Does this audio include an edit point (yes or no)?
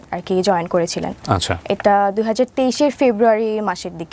no